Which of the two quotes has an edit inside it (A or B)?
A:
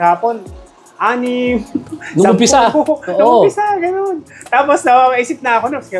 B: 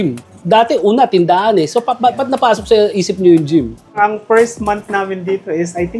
B